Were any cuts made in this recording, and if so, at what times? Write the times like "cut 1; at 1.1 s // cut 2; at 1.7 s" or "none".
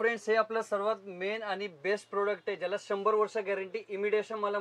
none